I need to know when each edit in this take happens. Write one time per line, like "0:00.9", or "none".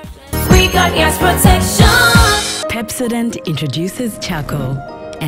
0:02.5